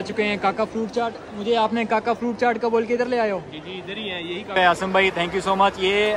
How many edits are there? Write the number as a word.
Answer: one